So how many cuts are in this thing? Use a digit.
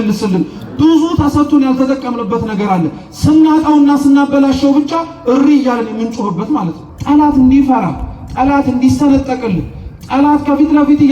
1